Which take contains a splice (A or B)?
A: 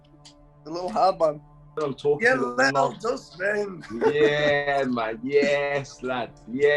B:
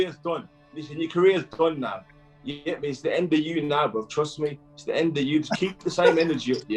A